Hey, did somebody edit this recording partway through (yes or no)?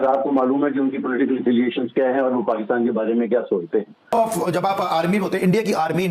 yes